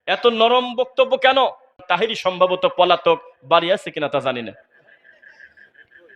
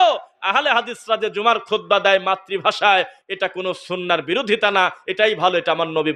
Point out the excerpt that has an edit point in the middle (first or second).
first